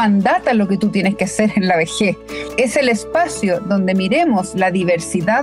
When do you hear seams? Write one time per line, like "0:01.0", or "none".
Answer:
0:02.5